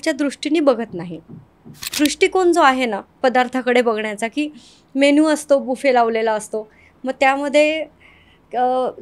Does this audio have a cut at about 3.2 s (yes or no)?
no